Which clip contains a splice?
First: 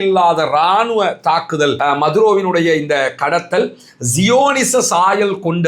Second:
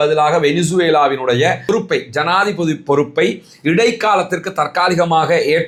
first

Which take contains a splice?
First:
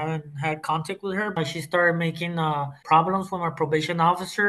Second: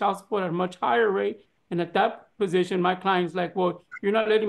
first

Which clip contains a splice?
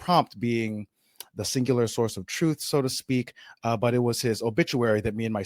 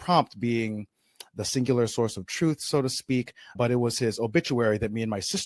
second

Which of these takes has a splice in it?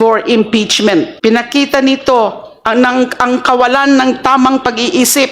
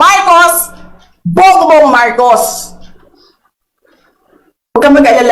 first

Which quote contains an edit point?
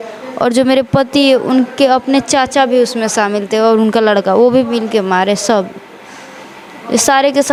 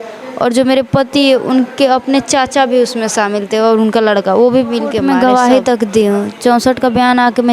second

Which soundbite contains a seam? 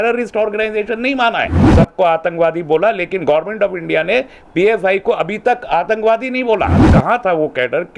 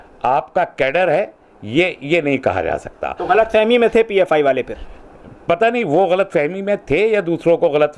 first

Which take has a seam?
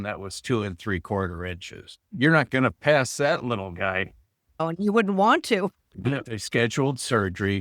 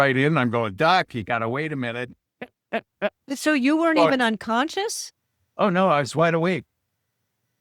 first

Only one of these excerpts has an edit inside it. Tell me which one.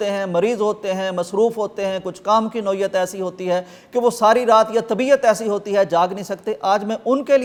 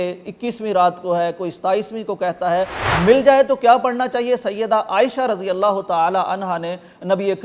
second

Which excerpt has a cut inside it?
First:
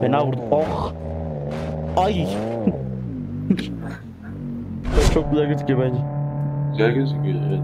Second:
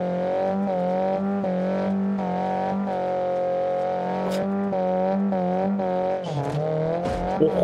first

